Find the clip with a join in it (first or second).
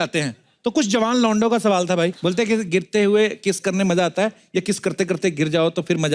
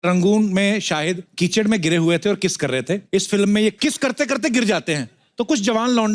second